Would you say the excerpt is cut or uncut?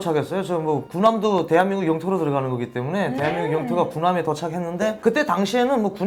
uncut